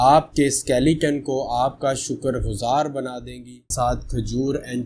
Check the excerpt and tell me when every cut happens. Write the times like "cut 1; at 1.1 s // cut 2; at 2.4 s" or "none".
cut 1; at 3.7 s